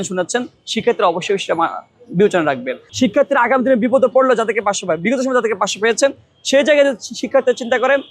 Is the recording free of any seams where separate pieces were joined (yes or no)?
no